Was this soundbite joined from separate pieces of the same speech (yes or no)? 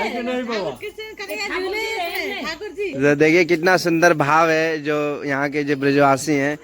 yes